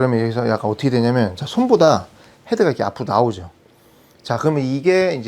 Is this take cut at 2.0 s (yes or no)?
no